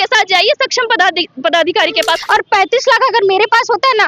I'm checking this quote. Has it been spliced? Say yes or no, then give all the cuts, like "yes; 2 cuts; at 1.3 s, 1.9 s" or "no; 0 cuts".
yes; 1 cut; at 2.2 s